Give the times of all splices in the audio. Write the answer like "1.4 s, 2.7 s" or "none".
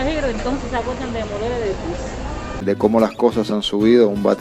2.6 s